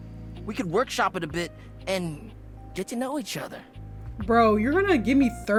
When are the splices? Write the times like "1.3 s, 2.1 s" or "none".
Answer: none